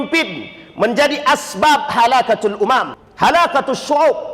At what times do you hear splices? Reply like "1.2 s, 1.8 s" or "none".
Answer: 3.0 s